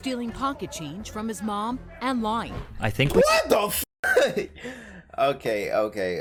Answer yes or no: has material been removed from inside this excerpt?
no